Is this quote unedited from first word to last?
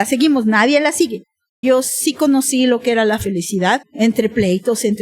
no; 2 cuts; at 1.6 s, 3.9 s

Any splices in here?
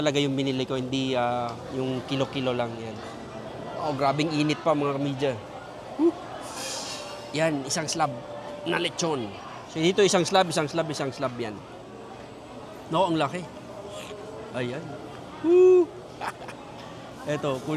no; 0 cuts

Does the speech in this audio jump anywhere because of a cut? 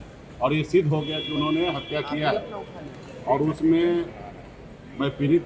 no; 0 cuts

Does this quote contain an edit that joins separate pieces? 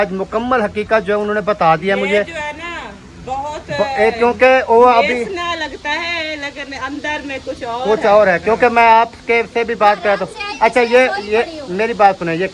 no; 0 cuts

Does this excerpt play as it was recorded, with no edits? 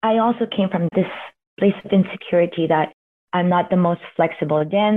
no; 1 cut; at 0.9 s

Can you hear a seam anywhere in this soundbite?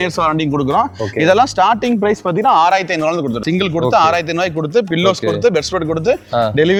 no; 0 cuts

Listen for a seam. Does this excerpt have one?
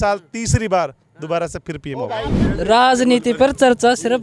yes; 1 cut; at 2.5 s

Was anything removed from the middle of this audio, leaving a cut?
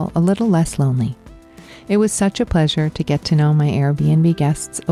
no; 0 cuts

